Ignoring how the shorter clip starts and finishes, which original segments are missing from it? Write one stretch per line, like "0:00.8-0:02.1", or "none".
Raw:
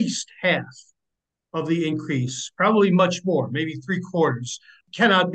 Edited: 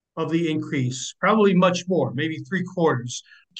none